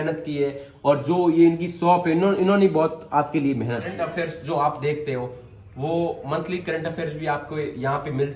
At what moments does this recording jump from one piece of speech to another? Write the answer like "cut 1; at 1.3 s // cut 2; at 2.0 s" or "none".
cut 1; at 4.0 s

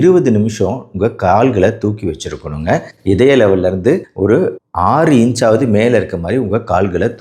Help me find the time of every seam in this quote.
none

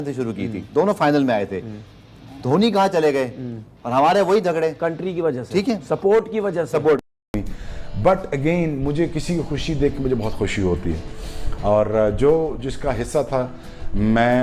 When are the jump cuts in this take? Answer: cut 1; at 7.1 s

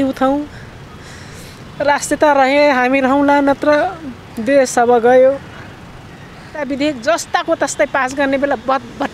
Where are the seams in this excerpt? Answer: cut 1; at 6.6 s

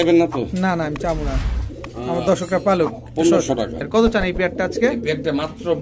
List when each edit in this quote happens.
cut 1; at 3.9 s

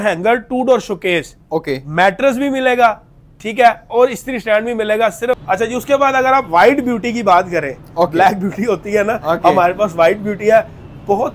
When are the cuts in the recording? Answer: cut 1; at 5.4 s

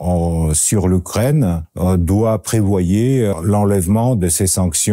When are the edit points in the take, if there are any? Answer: cut 1; at 1.7 s // cut 2; at 3.3 s

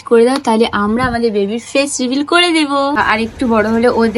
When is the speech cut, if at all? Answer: cut 1; at 3.0 s

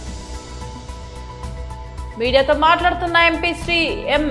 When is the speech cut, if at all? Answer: cut 1; at 1.6 s

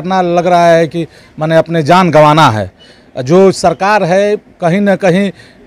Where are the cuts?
none

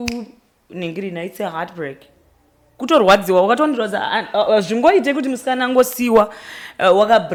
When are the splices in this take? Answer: none

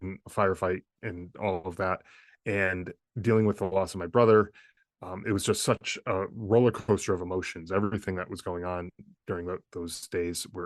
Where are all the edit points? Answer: cut 1; at 0.9 s

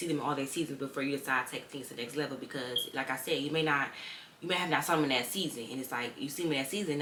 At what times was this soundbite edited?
none

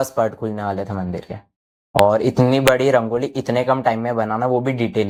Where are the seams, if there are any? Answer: none

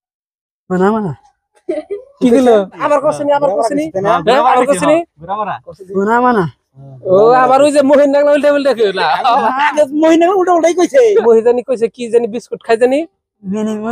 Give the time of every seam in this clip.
cut 1; at 2.8 s // cut 2; at 11.2 s

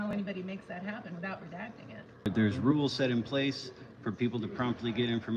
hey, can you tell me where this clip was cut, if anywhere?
cut 1; at 2.3 s

